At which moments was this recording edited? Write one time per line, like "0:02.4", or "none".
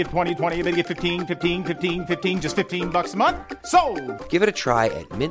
none

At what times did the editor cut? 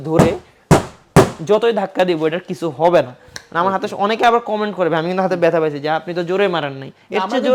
none

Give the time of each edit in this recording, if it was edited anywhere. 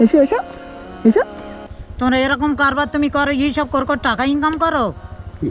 0:01.9

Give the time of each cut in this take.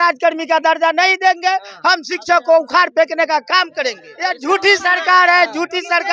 0:04.1

